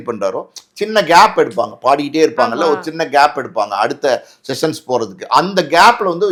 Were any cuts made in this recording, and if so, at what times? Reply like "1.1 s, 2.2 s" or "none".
none